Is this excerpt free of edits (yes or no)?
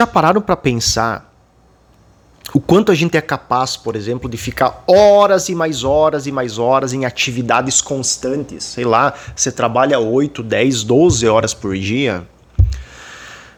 yes